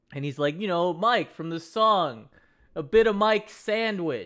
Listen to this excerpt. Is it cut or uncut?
uncut